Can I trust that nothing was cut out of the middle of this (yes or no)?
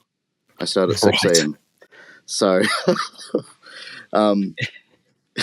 yes